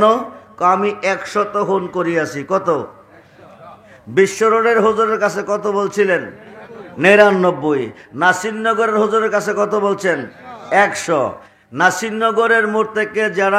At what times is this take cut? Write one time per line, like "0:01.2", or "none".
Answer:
0:11.5